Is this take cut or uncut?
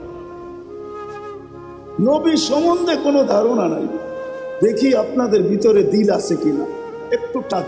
uncut